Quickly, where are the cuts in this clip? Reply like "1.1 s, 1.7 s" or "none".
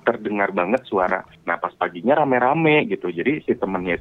1.4 s